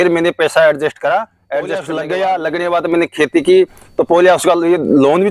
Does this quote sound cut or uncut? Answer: cut